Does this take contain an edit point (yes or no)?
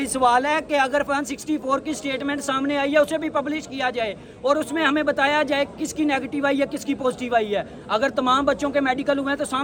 no